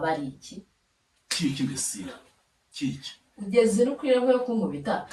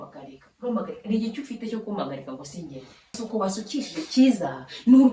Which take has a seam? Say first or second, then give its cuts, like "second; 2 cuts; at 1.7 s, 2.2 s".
second; 1 cut; at 3.2 s